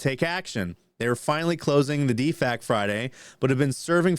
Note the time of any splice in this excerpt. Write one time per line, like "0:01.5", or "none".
none